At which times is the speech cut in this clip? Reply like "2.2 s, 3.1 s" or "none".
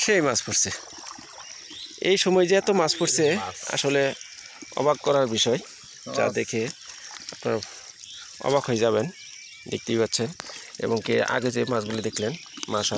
none